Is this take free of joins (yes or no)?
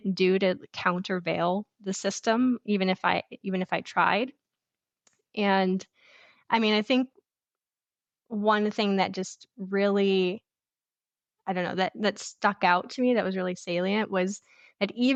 yes